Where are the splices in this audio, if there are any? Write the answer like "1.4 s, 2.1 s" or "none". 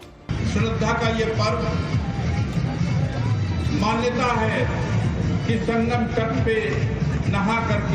1.9 s